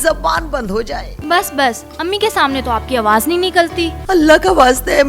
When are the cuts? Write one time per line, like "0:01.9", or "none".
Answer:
0:01.1
0:03.9